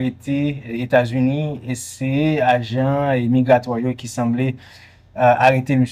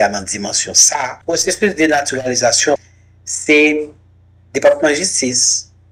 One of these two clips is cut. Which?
second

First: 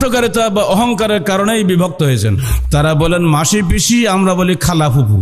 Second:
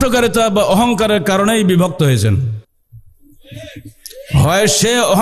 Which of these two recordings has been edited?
first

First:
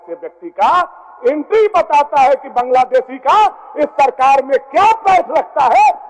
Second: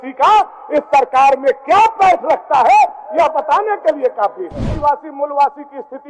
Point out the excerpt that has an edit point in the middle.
second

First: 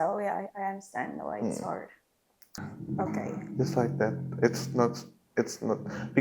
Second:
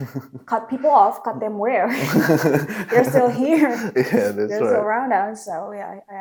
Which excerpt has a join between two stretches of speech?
first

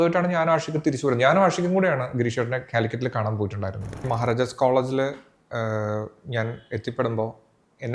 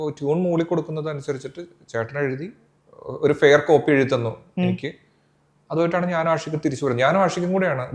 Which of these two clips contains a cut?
first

